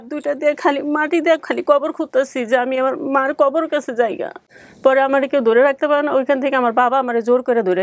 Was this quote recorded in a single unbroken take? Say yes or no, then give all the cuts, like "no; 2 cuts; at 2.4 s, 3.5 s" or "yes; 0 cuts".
yes; 0 cuts